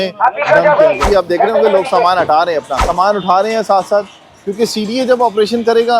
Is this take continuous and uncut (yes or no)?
no